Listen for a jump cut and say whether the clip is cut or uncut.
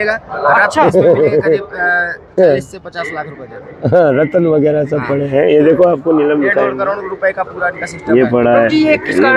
uncut